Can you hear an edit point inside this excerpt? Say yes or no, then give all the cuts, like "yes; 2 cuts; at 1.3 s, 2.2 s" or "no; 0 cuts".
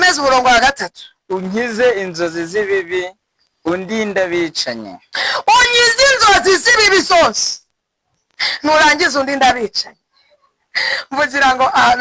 no; 0 cuts